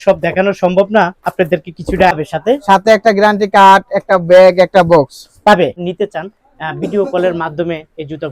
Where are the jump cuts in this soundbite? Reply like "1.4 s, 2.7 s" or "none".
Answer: 2.1 s, 5.8 s